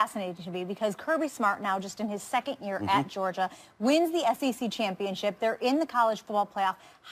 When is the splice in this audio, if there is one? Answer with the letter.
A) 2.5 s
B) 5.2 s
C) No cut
B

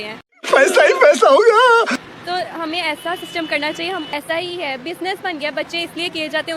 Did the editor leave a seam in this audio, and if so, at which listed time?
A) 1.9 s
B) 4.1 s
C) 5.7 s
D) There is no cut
B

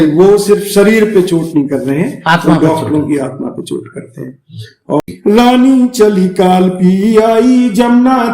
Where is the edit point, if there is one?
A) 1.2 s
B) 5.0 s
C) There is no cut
B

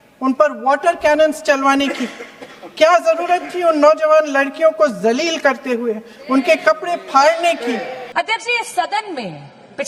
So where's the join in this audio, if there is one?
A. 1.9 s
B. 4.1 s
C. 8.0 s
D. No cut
C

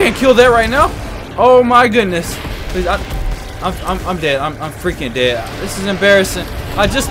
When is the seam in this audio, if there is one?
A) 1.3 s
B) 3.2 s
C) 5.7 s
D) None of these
D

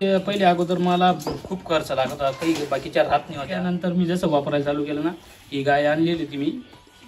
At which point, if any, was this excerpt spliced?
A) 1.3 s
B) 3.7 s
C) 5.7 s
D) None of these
B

